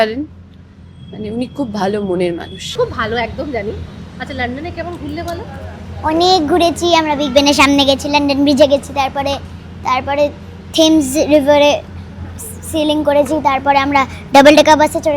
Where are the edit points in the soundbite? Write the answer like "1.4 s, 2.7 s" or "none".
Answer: 2.7 s